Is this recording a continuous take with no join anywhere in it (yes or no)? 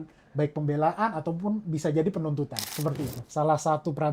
no